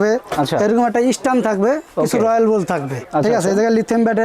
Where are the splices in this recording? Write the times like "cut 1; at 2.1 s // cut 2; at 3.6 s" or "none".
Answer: cut 1; at 3.0 s